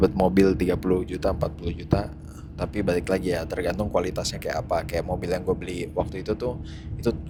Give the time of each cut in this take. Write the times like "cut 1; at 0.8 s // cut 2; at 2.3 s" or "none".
none

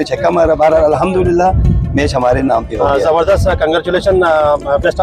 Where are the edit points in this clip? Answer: none

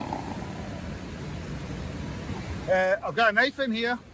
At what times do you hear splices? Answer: cut 1; at 2.2 s

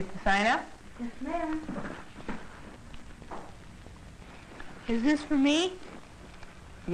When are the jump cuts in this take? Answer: cut 1; at 4.3 s

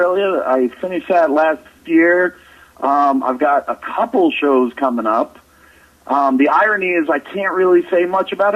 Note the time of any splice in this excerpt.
cut 1; at 4.4 s

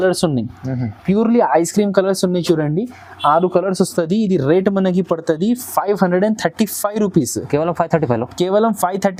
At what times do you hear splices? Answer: none

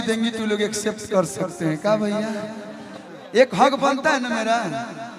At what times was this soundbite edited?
cut 1; at 3.0 s

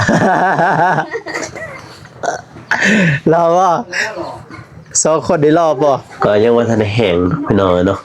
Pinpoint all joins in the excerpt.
cut 1; at 6.1 s

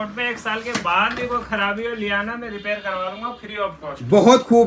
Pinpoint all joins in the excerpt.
none

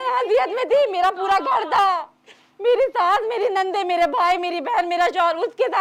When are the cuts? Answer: none

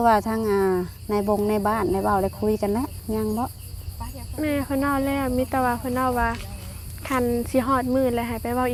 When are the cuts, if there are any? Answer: none

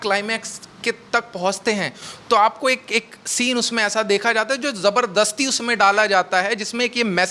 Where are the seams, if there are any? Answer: none

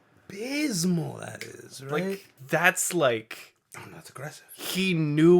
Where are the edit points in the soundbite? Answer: cut 1; at 2.3 s

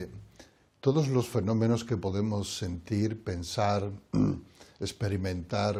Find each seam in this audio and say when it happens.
none

